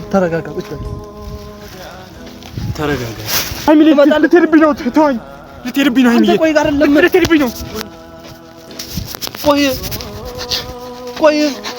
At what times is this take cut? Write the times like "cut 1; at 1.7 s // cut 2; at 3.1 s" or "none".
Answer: cut 1; at 3.6 s